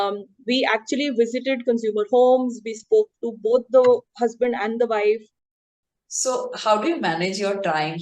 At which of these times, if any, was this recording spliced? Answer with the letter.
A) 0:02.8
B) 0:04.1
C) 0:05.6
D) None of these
C